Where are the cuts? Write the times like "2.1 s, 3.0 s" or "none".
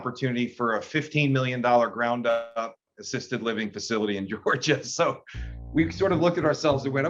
none